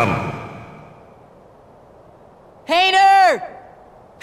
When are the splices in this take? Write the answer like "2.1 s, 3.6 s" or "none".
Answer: none